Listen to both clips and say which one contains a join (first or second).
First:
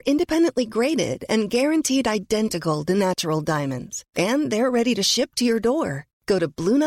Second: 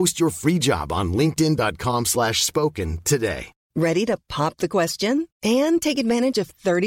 second